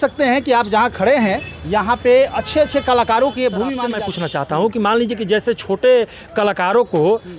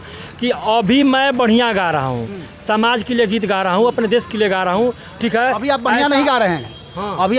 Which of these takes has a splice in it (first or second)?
first